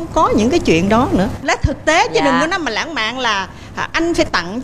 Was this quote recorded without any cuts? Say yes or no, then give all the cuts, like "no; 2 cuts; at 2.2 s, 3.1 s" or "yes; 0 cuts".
no; 1 cut; at 1.4 s